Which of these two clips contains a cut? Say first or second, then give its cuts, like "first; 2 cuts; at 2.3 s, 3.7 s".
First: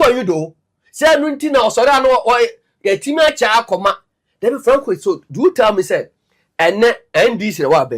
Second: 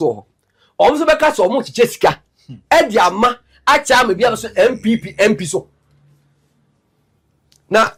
first; 1 cut; at 5.9 s